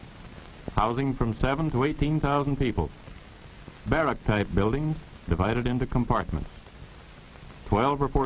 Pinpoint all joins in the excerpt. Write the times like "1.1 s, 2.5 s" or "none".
1.2 s